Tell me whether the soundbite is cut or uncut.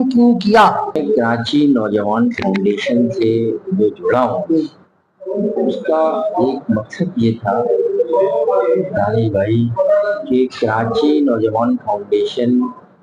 cut